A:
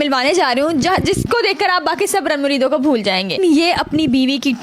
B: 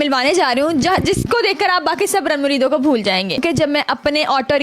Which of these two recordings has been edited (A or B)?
A